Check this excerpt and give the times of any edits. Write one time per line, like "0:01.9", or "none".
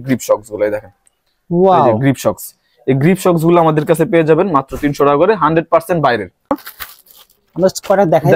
0:06.5